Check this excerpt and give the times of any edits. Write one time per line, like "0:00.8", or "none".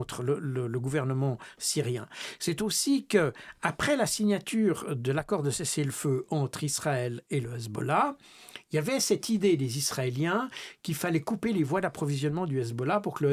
none

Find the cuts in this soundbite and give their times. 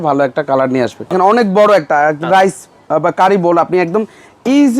0:01.1

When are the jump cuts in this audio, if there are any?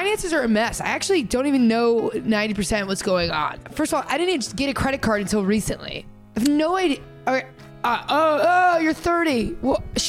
0:03.8

